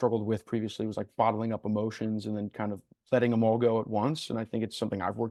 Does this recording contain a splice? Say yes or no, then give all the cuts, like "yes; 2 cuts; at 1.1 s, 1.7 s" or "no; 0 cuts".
no; 0 cuts